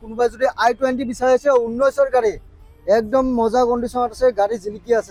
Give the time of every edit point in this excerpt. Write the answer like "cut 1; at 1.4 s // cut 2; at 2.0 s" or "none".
none